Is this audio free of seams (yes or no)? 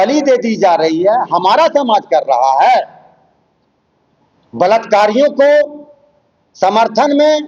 yes